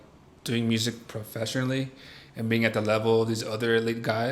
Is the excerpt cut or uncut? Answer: uncut